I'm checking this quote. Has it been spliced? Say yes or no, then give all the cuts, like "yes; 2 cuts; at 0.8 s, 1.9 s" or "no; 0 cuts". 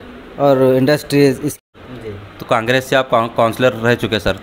yes; 1 cut; at 1.6 s